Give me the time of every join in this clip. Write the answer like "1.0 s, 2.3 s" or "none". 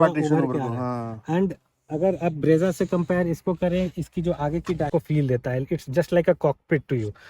4.9 s